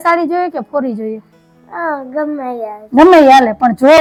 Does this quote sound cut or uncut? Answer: uncut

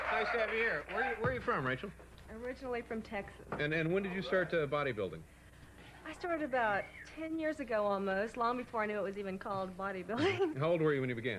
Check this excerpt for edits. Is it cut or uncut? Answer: uncut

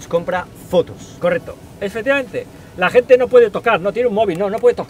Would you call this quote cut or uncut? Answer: uncut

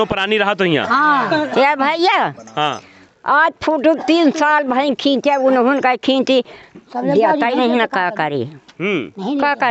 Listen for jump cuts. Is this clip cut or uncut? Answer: uncut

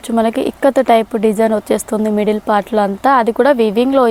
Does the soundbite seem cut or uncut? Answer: uncut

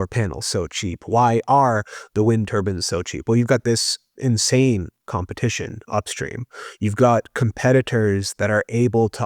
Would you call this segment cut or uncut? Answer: uncut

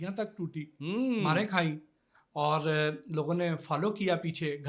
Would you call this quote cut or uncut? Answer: uncut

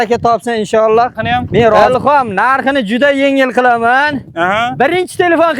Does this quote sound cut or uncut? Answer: cut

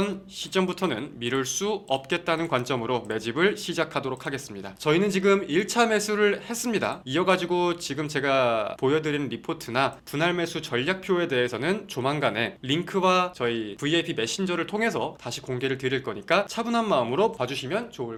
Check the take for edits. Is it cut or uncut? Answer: uncut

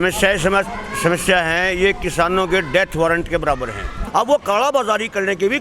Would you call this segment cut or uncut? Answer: cut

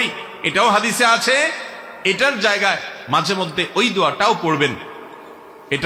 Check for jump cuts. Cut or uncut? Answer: uncut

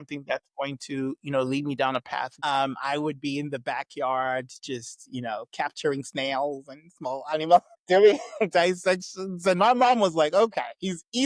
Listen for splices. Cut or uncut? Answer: cut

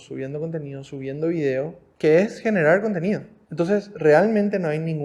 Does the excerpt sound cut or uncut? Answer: cut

